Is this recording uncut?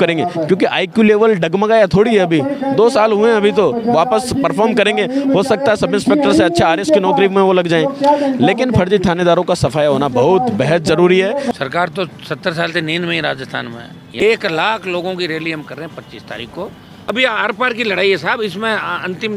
no; 3 cuts; at 11.5 s, 14.2 s, 17.1 s

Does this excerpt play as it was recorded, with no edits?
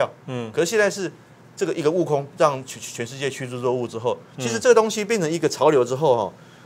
yes; 0 cuts

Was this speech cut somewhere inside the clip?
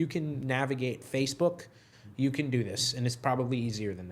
no; 0 cuts

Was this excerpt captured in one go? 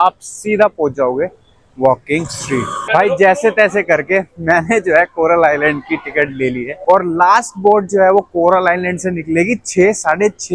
no; 2 cuts; at 2.9 s, 6.8 s

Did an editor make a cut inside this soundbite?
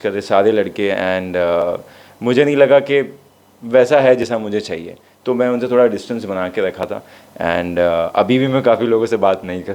no; 0 cuts

